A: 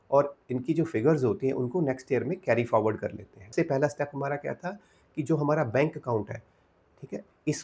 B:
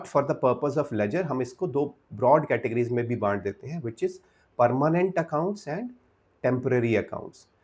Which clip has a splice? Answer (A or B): A